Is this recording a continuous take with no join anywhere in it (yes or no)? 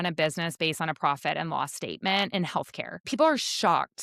no